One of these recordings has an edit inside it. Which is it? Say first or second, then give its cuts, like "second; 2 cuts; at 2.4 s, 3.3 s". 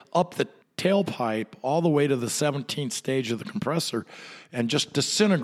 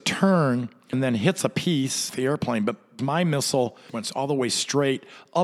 second; 4 cuts; at 0.9 s, 2.1 s, 3.0 s, 4.0 s